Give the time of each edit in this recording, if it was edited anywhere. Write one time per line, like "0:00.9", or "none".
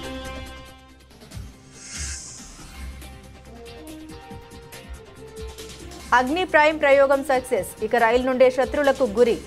0:02.6
0:04.4
0:06.0